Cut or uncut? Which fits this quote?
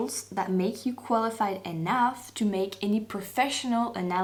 uncut